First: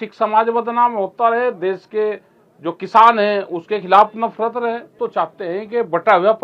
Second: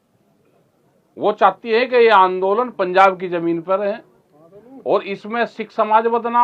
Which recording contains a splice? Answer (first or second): first